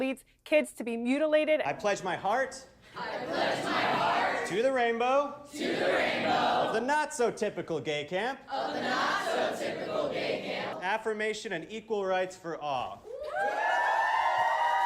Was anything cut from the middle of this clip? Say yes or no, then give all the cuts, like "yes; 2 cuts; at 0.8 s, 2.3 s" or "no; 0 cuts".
yes; 3 cuts; at 1.6 s, 10.7 s, 13.0 s